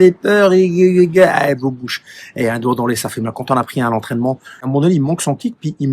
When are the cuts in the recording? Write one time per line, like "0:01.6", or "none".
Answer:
0:04.6